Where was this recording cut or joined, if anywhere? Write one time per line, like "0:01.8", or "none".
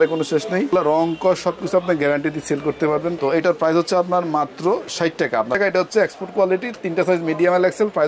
0:00.7
0:03.2
0:05.6